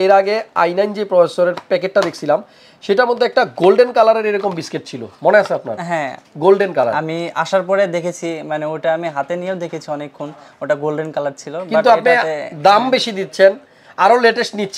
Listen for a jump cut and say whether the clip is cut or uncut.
uncut